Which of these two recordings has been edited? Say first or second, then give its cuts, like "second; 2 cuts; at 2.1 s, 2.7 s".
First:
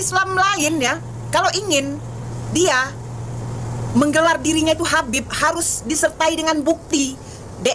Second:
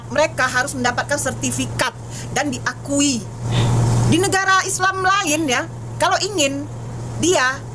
second; 1 cut; at 3.4 s